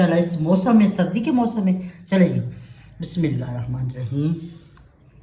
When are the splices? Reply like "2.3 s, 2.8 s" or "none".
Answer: none